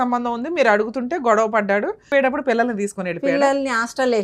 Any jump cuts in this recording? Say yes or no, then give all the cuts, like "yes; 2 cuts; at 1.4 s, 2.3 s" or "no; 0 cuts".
yes; 1 cut; at 2.1 s